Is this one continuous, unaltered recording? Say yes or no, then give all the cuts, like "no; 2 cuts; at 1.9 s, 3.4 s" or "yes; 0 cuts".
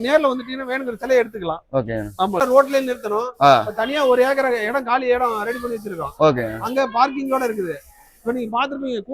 no; 1 cut; at 2.4 s